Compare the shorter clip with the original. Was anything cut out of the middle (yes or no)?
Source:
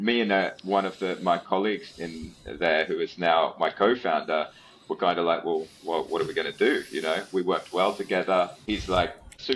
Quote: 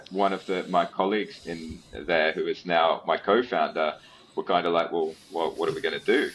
no